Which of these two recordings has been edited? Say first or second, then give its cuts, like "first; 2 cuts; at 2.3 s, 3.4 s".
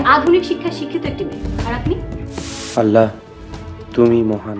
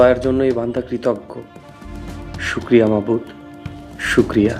first; 1 cut; at 2.6 s